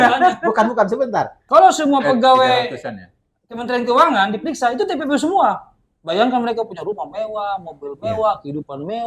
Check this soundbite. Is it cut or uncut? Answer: cut